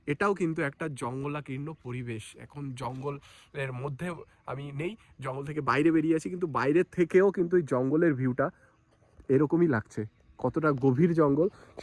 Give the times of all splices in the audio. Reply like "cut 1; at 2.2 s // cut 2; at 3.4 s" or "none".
none